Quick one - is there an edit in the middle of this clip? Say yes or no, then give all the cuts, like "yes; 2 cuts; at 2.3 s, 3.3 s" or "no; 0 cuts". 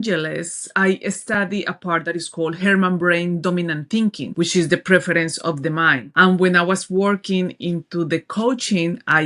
no; 0 cuts